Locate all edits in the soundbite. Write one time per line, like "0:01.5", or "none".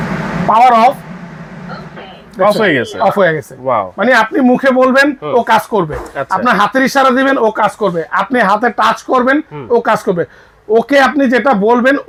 none